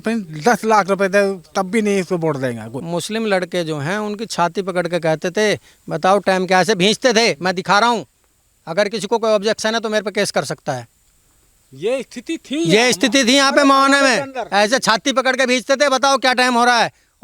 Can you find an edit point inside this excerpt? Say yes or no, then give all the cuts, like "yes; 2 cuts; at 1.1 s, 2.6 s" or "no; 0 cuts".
yes; 1 cut; at 2.7 s